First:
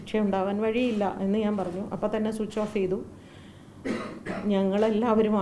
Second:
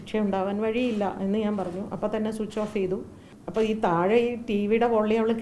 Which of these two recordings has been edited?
second; 1 cut; at 3.4 s

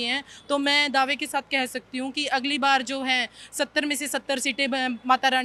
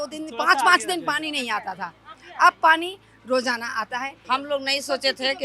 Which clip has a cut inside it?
second; 1 cut; at 4.2 s

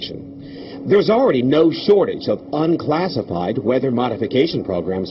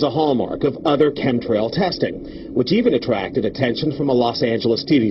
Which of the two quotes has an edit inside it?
first; 1 cut; at 2.0 s

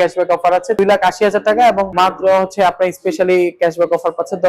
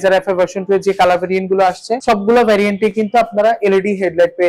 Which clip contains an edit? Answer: first; 2 cuts; at 0.8 s, 1.9 s

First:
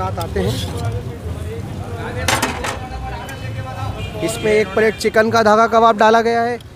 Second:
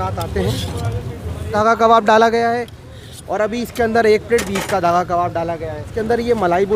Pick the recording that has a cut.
second; 2 cuts; at 1.5 s, 5.9 s

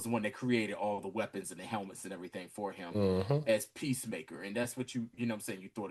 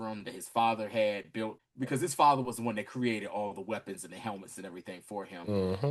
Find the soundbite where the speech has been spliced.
second; 1 cut; at 1.6 s

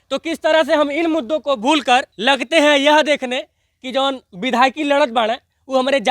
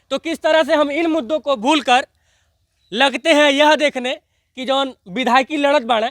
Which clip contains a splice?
first; 1 cut; at 2.1 s

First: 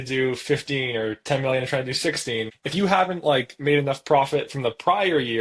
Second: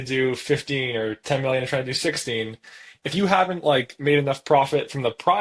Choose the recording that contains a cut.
first; 1 cut; at 2.6 s

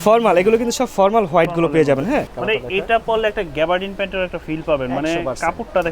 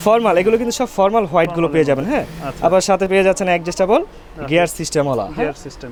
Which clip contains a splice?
first; 1 cut; at 2.3 s

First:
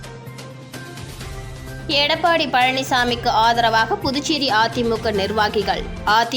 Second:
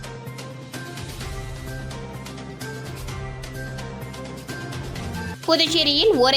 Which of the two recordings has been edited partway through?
first; 1 cut; at 1.4 s

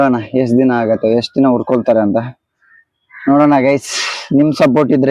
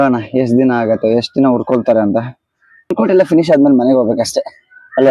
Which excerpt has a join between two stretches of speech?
second; 1 cut; at 2.9 s

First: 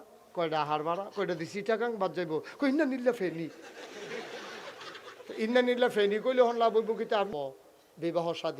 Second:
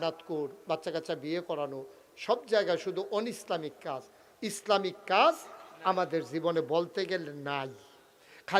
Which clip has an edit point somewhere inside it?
first; 1 cut; at 7.3 s

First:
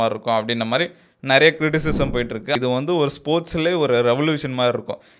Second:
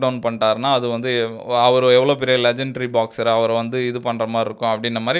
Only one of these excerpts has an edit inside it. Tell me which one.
first; 1 cut; at 2.6 s

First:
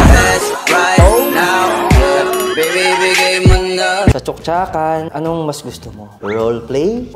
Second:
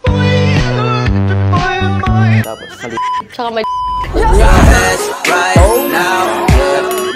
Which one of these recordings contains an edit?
first; 2 cuts; at 4.1 s, 5.1 s

